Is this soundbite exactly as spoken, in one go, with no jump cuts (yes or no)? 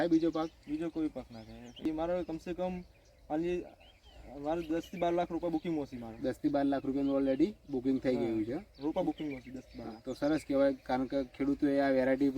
no